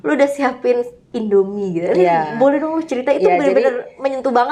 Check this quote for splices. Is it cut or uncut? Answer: uncut